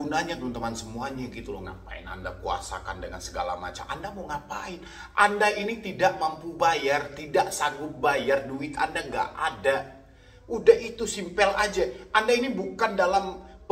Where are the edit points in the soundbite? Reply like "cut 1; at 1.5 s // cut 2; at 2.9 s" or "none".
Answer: none